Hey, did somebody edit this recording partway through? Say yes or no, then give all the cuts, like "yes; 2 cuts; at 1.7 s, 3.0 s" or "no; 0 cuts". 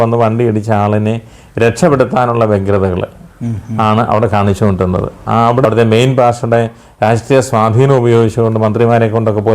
yes; 1 cut; at 5.6 s